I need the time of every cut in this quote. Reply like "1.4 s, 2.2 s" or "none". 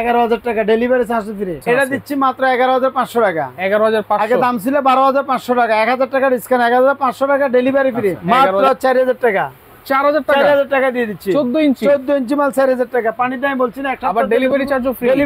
1.6 s, 8.2 s